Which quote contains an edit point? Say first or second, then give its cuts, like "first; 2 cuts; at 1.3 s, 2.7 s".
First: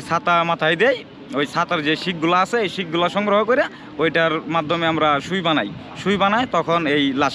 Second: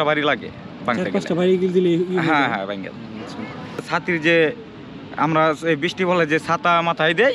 second; 1 cut; at 3.9 s